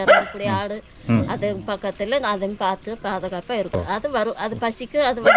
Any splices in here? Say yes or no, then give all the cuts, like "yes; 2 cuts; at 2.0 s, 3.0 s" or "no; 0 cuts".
yes; 1 cut; at 3.9 s